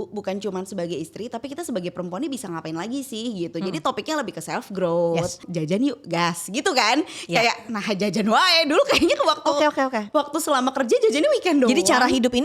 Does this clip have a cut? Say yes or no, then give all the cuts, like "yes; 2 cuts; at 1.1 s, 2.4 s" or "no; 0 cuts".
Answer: yes; 1 cut; at 5.5 s